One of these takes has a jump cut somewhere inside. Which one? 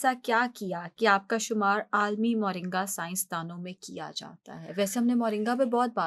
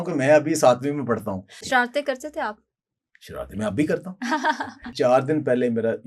second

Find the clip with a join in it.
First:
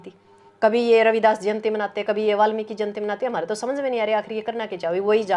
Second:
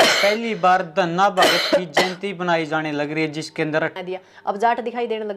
second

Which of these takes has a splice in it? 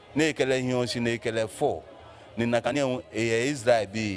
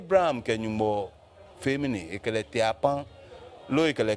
first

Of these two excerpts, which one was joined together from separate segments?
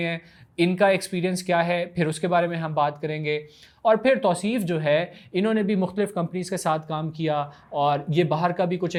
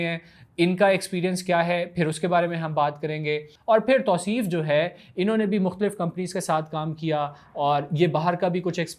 second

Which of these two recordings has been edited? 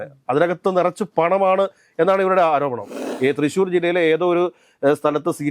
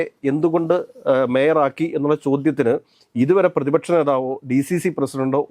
first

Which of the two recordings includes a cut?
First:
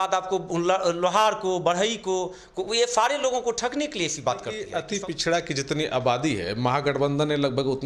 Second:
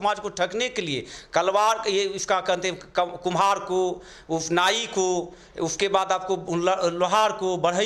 first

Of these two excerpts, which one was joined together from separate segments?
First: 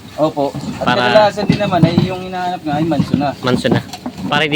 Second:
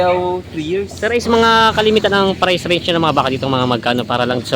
second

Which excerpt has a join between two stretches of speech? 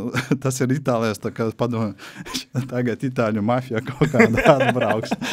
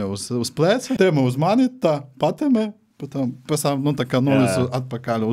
second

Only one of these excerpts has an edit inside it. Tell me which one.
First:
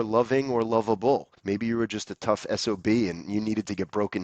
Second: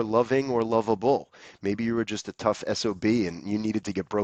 first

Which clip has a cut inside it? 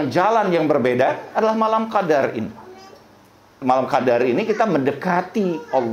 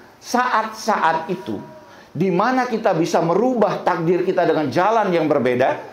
first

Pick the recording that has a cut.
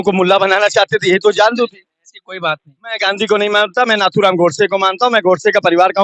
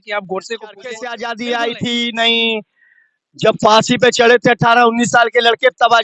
second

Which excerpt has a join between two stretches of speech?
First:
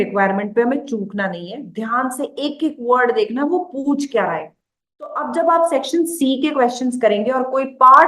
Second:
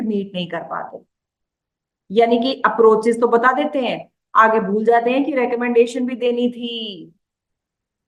first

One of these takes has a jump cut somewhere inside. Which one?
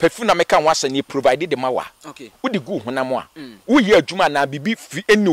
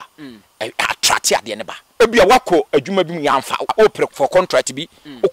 second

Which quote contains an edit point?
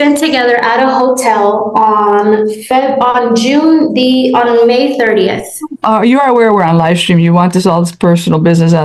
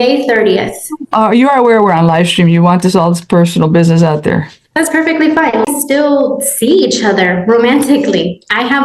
second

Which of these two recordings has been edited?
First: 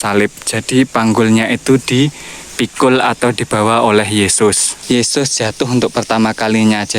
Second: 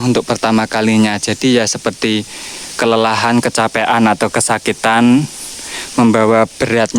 first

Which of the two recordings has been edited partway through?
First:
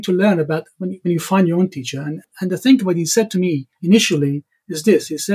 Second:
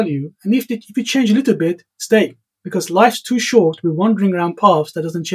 first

